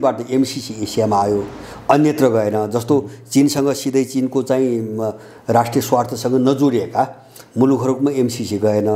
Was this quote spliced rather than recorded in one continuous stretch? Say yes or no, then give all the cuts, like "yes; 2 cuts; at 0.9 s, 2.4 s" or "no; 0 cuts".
no; 0 cuts